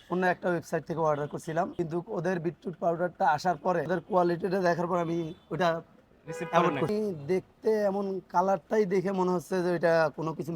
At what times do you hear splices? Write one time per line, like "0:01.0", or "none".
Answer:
0:01.7
0:03.9
0:06.9